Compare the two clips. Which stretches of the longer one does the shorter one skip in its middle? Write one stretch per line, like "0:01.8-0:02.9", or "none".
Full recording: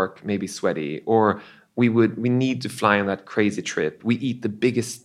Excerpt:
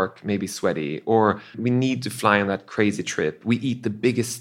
0:01.6-0:02.2